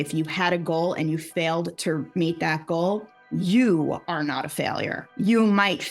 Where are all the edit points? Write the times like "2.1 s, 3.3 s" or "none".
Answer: 5.0 s